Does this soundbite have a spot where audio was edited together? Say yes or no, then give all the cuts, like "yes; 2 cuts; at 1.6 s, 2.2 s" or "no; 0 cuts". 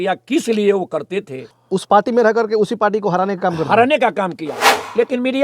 yes; 2 cuts; at 1.6 s, 4.5 s